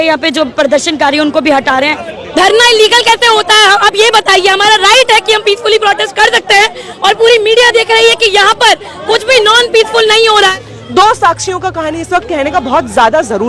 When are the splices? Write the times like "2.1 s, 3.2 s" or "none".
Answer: 2.1 s, 10.5 s